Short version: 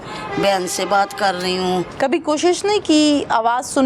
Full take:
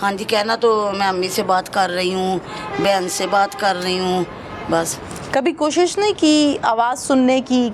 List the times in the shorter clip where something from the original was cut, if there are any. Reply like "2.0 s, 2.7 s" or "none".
1.9 s